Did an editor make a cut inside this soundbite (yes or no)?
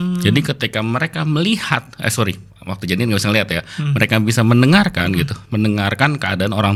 no